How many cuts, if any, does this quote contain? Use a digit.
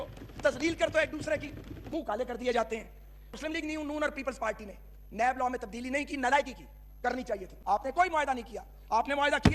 3